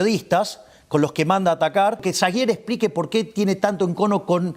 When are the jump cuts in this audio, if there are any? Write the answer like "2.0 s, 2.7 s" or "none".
2.1 s